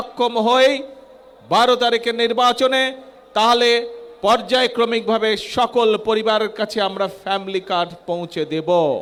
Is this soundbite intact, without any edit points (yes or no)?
yes